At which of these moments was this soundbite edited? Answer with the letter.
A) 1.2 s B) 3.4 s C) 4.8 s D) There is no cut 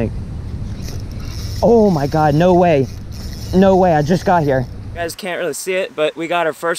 C